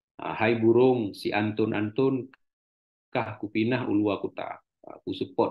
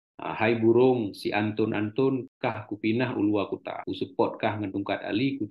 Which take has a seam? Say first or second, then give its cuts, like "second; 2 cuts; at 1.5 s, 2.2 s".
second; 2 cuts; at 2.3 s, 3.8 s